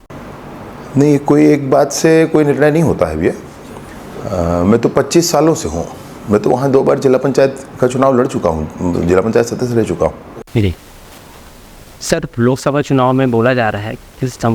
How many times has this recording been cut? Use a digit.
1